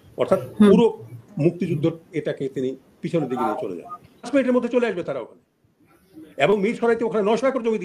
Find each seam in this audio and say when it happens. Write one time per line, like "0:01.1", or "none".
0:04.3